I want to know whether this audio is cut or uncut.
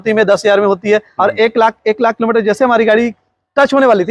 cut